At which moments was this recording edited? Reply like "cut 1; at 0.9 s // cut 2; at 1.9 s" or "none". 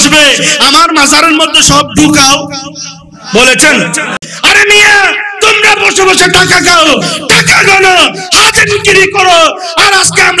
cut 1; at 4.2 s